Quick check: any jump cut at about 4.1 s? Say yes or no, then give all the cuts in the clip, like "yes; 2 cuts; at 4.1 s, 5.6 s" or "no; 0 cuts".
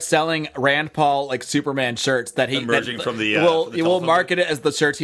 no; 0 cuts